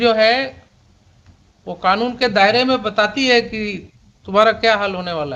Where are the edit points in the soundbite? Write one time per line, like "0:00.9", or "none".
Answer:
none